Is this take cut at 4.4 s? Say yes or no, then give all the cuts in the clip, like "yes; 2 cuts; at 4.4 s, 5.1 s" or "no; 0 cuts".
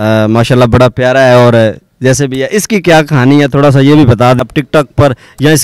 yes; 1 cut; at 4.4 s